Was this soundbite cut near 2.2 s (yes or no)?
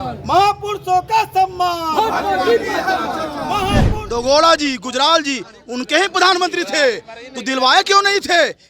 no